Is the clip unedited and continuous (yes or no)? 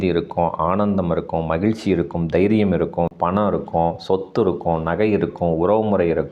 no